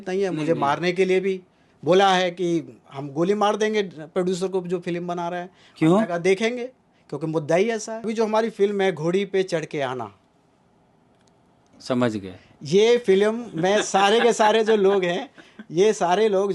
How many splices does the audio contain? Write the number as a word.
one